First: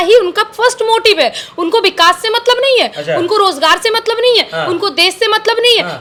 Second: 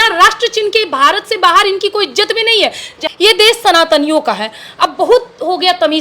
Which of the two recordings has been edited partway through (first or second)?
second